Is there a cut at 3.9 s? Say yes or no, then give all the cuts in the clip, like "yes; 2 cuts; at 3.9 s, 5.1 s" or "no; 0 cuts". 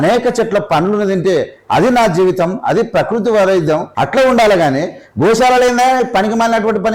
yes; 1 cut; at 3.9 s